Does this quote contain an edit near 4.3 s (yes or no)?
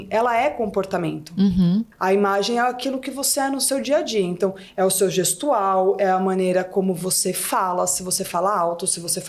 no